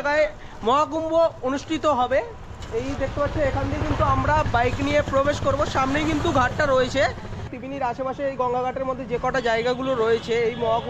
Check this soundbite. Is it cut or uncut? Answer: uncut